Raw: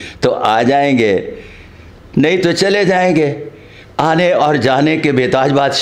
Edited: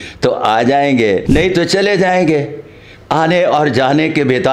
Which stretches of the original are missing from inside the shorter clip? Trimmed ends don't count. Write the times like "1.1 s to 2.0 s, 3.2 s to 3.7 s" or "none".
1.2 s to 2.1 s